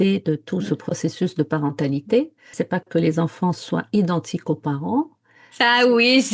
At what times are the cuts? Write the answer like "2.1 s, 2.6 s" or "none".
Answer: 2.5 s